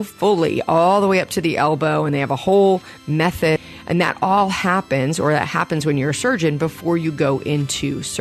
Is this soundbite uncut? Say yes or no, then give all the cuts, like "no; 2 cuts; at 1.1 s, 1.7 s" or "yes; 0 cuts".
no; 1 cut; at 3.6 s